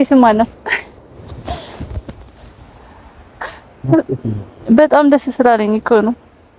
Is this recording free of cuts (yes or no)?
yes